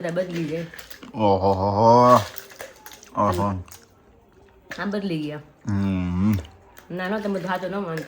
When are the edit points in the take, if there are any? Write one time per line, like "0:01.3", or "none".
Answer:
none